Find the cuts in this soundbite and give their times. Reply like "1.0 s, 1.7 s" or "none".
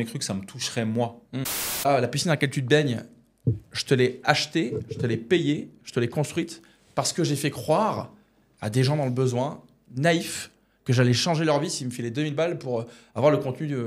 1.8 s